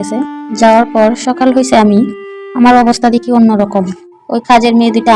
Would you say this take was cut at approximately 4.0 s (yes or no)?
yes